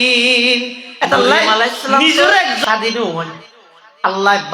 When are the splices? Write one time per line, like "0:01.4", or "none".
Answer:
0:02.6